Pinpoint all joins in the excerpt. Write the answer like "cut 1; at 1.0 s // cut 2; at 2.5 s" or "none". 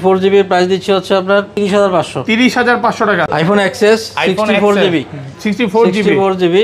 cut 1; at 1.5 s // cut 2; at 3.2 s

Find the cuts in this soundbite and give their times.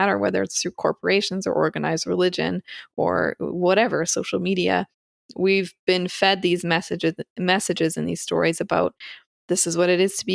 none

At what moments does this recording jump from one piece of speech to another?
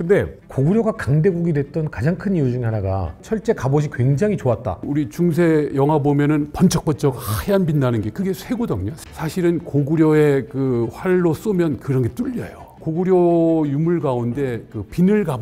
cut 1; at 3.2 s // cut 2; at 4.8 s // cut 3; at 9.0 s // cut 4; at 12.8 s

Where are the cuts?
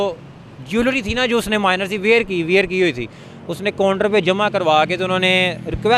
none

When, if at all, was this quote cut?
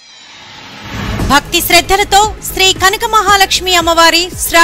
cut 1; at 1.1 s

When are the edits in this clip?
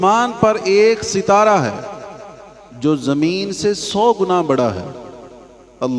none

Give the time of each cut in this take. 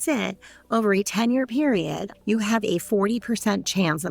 cut 1; at 2.1 s

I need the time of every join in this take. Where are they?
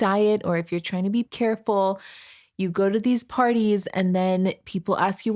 cut 1; at 1.3 s

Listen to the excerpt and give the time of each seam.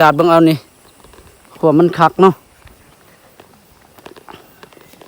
none

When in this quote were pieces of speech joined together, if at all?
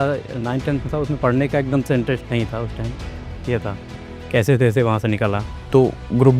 cut 1; at 5.5 s

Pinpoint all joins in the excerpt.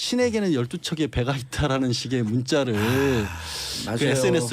cut 1; at 1.4 s

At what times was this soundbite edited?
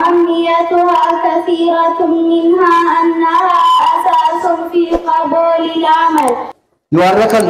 cut 1; at 6.5 s

